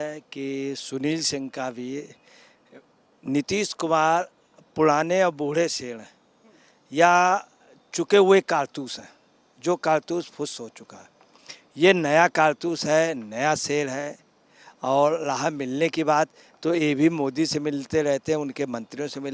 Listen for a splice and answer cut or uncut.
uncut